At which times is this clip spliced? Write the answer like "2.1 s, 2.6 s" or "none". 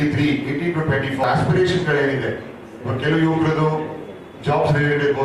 1.2 s